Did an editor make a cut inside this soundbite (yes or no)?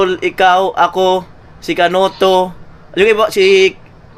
no